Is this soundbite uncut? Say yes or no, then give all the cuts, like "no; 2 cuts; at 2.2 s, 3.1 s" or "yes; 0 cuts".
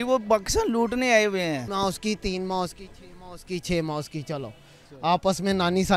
no; 1 cut; at 1.7 s